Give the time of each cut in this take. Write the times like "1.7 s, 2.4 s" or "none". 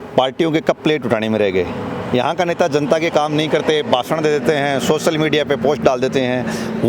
none